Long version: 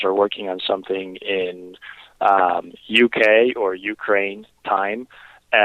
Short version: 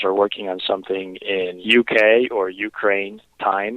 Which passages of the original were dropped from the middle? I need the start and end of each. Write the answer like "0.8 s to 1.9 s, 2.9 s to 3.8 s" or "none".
1.6 s to 2.8 s